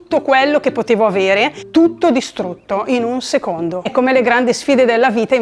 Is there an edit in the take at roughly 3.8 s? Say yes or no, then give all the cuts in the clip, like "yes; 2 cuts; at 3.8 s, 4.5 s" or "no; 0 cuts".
yes; 1 cut; at 3.8 s